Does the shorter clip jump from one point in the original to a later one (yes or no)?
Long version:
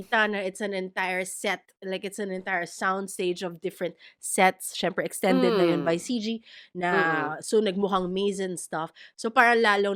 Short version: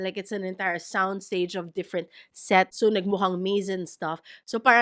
yes